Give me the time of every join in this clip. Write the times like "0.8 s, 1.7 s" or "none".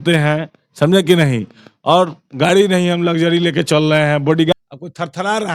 4.5 s

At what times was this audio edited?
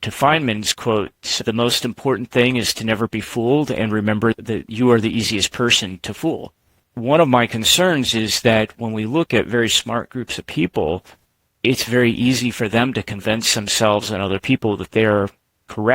1.5 s, 4.4 s, 6.9 s

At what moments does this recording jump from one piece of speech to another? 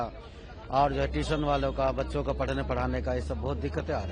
none

